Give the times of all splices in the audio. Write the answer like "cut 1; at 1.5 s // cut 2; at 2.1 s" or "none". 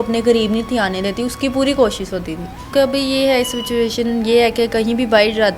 cut 1; at 2.5 s